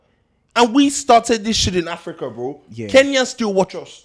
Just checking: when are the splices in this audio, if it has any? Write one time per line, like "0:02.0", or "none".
none